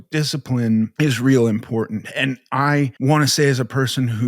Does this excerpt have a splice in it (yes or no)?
yes